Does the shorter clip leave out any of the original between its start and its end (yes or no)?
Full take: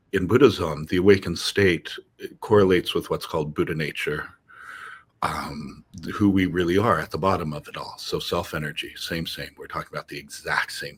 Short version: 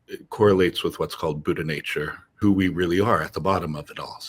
yes